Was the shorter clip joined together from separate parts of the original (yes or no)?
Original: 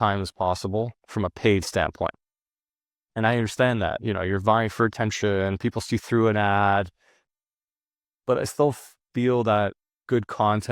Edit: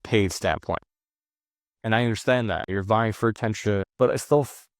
yes